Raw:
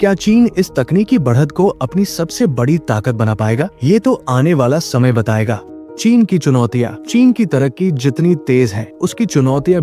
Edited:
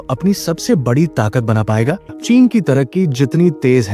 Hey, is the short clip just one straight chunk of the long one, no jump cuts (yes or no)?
no